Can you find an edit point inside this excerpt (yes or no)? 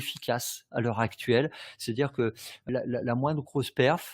yes